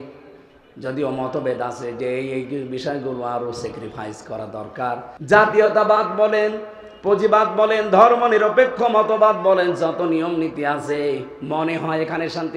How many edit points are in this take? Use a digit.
1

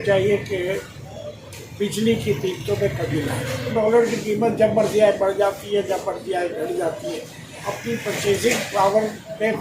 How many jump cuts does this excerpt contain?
2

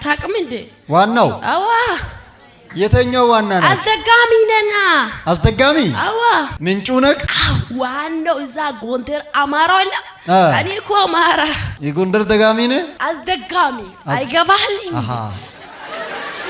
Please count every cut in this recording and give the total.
0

